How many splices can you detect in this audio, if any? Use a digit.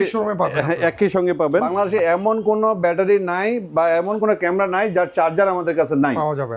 1